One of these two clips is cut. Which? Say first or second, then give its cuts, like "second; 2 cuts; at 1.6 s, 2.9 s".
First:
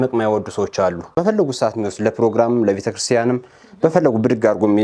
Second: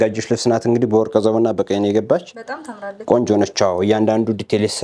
first; 1 cut; at 1.2 s